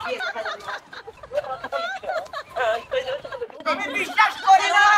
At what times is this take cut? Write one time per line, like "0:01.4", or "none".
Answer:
0:03.6